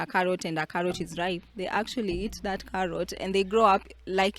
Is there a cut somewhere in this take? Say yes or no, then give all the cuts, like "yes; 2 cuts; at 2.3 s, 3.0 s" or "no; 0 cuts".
no; 0 cuts